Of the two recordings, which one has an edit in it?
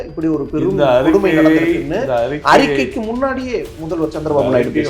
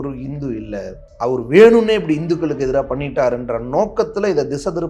second; 1 cut; at 1.0 s

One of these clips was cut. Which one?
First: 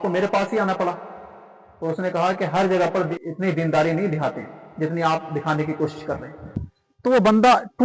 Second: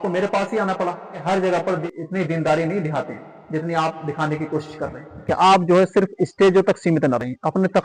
second; 2 cuts; at 1.2 s, 5.3 s

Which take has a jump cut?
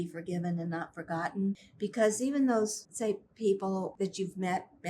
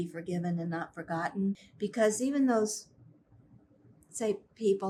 first; 2 cuts; at 2.8 s, 3.9 s

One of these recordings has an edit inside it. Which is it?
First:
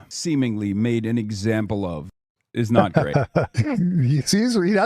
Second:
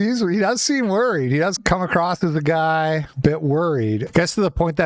second; 3 cuts; at 1.6 s, 3.1 s, 4.0 s

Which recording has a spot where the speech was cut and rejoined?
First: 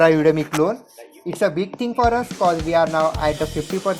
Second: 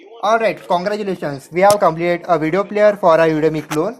second; 1 cut; at 1.8 s

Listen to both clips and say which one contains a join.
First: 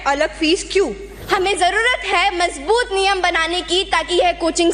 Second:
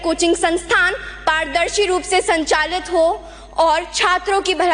first; 1 cut; at 1.1 s

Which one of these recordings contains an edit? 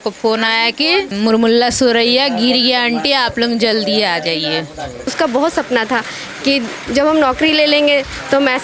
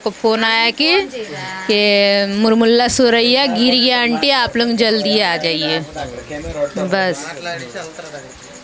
first; 2 cuts; at 1.1 s, 5.1 s

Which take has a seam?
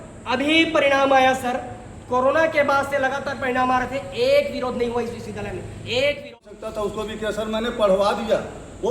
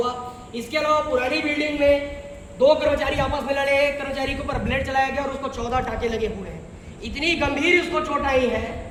first; 1 cut; at 6.6 s

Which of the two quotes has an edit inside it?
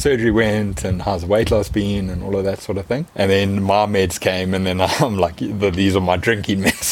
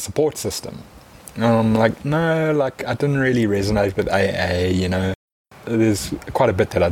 second; 1 cut; at 5.5 s

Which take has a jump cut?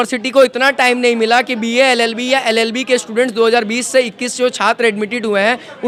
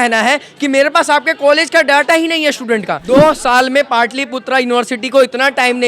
second; 1 cut; at 2.9 s

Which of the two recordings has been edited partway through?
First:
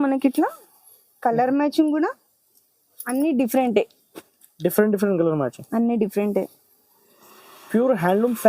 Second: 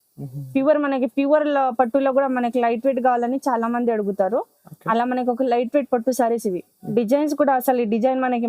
second; 1 cut; at 6.7 s

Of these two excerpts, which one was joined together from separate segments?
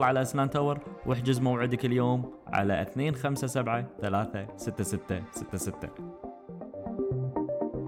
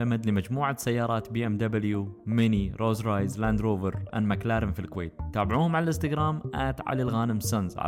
first; 1 cut; at 5.7 s

